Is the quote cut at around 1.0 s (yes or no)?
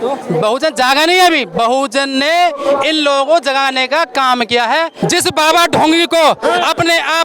no